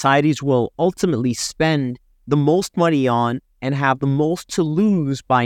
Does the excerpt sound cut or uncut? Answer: uncut